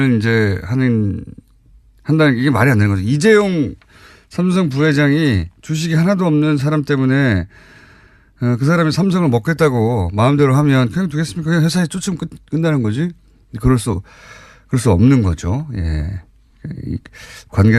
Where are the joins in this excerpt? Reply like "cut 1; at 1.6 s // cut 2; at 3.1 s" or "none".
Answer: cut 1; at 5.8 s